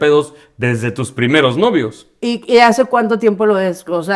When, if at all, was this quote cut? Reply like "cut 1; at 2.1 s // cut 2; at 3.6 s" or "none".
none